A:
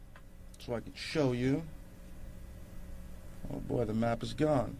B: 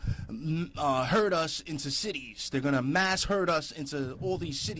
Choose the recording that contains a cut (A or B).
B